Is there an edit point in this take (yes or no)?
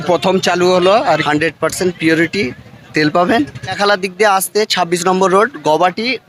yes